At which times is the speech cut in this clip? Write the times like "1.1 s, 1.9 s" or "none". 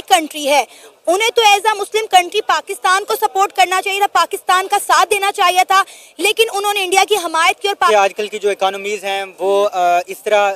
7.9 s